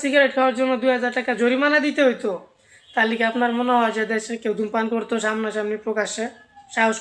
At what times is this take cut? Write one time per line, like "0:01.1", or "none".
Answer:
none